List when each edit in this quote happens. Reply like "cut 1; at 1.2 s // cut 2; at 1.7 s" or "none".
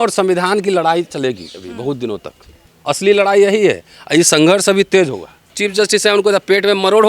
cut 1; at 2.7 s // cut 2; at 5.5 s